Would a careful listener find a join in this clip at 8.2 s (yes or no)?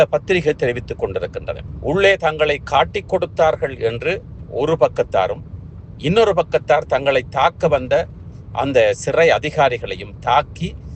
no